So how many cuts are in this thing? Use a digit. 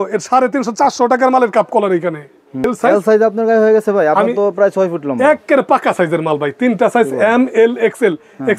1